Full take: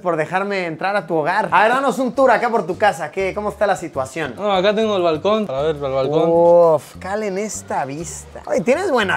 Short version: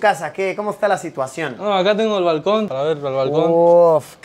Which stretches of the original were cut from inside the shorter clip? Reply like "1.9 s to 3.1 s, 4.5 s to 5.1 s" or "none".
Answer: none